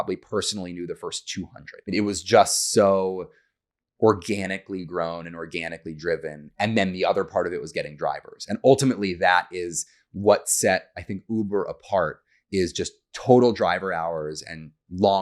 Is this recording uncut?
no; 1 cut; at 1.9 s

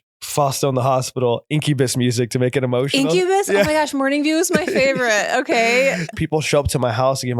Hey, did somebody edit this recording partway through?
yes; 1 cut; at 6.1 s

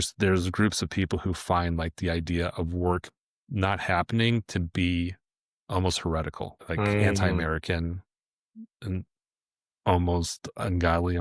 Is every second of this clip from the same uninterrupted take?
no; 1 cut; at 6.6 s

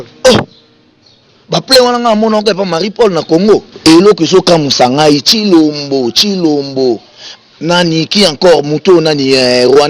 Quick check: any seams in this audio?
yes; 1 cut; at 3.7 s

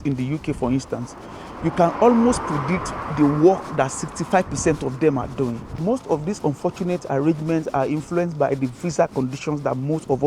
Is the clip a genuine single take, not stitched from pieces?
yes; 0 cuts

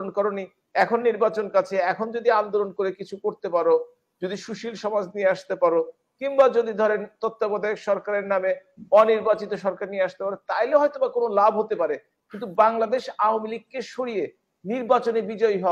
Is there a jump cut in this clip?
no; 0 cuts

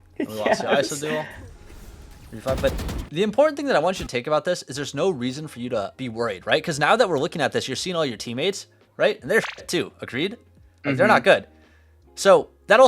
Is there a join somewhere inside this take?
yes; 1 cut; at 5.9 s

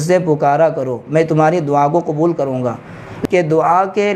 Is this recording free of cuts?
no; 1 cut; at 3.1 s

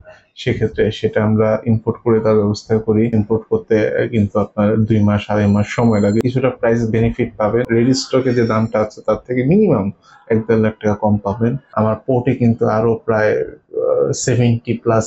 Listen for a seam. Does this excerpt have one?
yes; 4 cuts; at 3.1 s, 6.2 s, 7.7 s, 11.6 s

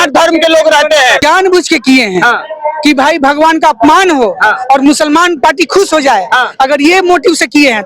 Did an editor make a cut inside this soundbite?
yes; 1 cut; at 1.2 s

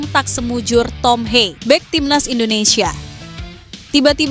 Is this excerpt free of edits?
no; 1 cut; at 1.6 s

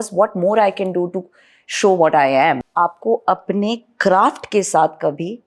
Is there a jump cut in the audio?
yes; 1 cut; at 2.6 s

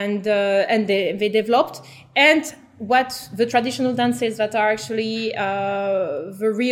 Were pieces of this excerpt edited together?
no; 0 cuts

